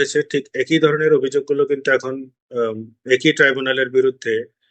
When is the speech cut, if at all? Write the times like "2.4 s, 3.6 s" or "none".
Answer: none